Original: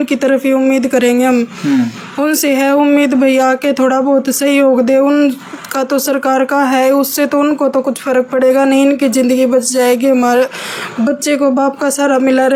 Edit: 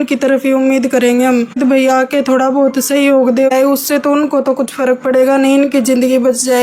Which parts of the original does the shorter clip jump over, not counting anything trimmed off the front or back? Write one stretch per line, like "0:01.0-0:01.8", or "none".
0:01.6-0:03.1
0:05.0-0:06.8